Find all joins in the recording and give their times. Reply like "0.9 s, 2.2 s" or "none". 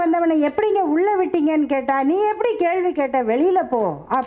none